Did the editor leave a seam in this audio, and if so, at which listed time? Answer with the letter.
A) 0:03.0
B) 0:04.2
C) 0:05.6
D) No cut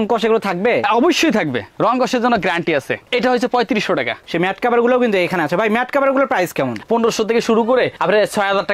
B